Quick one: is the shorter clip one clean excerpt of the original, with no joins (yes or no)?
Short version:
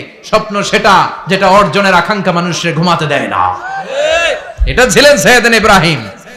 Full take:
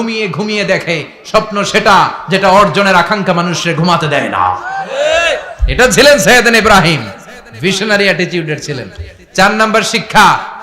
yes